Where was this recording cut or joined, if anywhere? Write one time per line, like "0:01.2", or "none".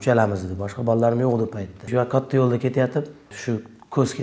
0:01.8
0:03.2

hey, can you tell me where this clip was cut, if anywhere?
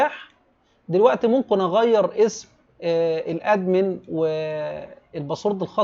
none

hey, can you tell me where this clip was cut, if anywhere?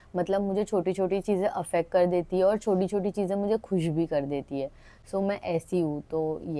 none

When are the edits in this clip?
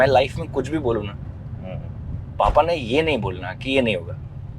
none

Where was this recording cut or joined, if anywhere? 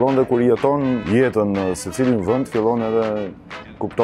0:01.0

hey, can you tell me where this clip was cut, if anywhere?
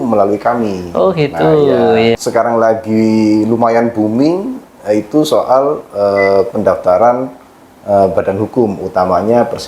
0:02.2

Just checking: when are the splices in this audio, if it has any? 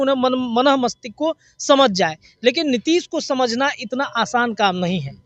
none

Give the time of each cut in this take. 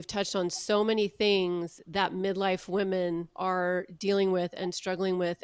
0:03.3

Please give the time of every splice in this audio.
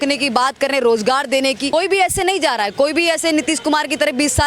0:01.7

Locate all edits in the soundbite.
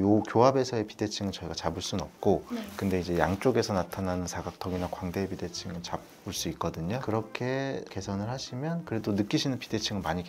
none

